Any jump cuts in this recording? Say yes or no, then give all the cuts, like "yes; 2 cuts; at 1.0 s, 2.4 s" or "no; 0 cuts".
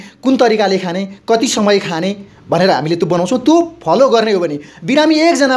no; 0 cuts